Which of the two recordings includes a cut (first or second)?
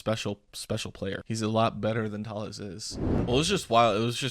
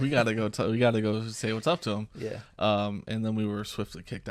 first